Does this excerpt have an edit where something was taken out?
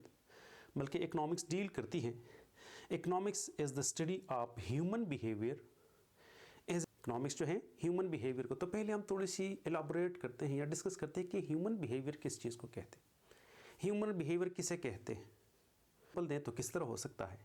yes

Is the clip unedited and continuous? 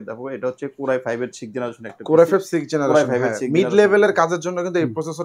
yes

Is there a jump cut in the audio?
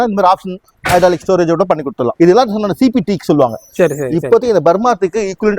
yes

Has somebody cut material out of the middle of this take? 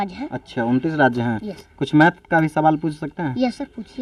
no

